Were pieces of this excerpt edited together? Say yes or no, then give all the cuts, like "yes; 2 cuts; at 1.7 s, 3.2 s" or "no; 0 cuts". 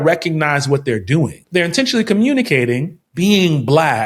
yes; 2 cuts; at 1.4 s, 3.0 s